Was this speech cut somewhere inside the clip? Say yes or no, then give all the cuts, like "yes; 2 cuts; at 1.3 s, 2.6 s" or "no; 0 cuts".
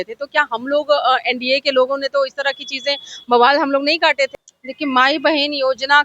yes; 1 cut; at 4.5 s